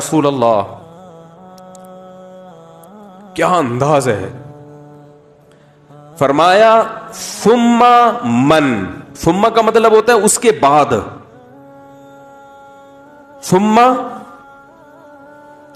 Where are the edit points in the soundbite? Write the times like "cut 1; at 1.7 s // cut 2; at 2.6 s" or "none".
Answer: cut 1; at 0.8 s // cut 2; at 3.4 s // cut 3; at 4.4 s // cut 4; at 6.2 s // cut 5; at 11.7 s // cut 6; at 13.3 s